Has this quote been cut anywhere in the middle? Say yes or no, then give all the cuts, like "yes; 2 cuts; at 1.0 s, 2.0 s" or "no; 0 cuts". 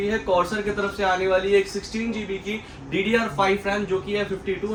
no; 0 cuts